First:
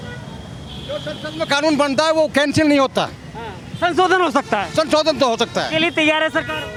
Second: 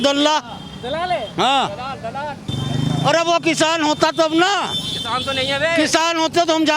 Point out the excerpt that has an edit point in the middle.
second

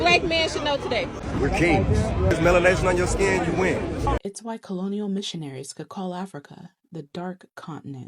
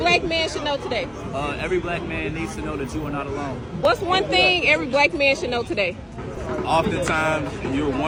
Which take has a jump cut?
first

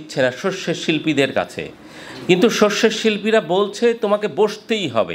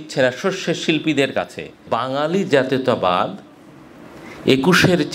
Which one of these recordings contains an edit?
second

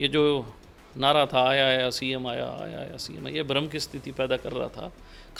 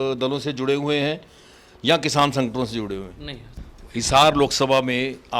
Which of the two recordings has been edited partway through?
second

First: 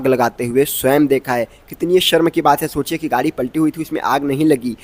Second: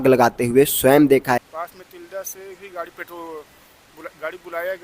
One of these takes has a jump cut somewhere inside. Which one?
second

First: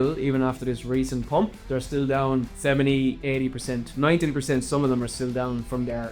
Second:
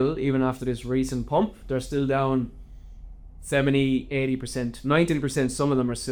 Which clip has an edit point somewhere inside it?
first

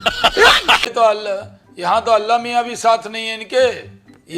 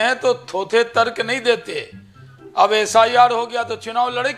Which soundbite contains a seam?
first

